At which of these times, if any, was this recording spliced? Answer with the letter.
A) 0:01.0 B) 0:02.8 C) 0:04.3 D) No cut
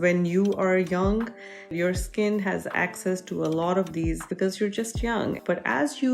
C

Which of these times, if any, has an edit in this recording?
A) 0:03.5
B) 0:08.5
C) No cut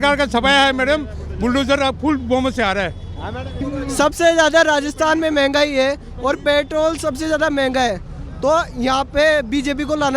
A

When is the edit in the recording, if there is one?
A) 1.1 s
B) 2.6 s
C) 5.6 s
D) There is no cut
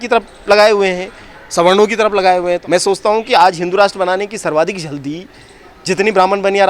B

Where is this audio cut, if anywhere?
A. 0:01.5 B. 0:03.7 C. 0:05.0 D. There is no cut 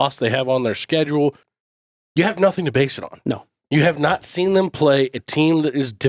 A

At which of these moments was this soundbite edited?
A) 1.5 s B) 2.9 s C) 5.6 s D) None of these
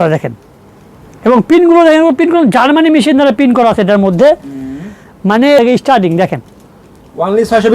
C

